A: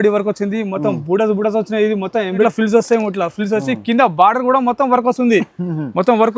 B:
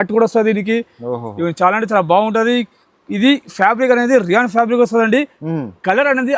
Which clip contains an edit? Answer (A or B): A